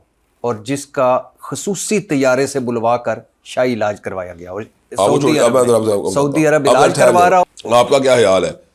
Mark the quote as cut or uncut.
cut